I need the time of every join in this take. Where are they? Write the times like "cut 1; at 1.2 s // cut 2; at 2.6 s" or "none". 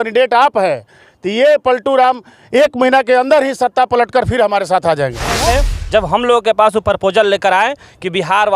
cut 1; at 5.4 s